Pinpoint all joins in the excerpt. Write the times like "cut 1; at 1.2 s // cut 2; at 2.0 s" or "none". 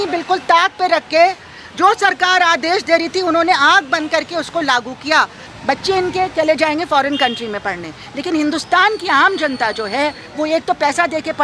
cut 1; at 5.5 s